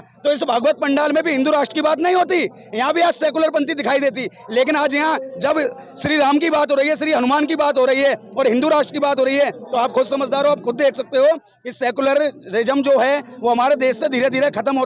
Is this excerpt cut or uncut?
uncut